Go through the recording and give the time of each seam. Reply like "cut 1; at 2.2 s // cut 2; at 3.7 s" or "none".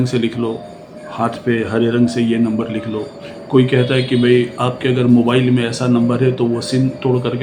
none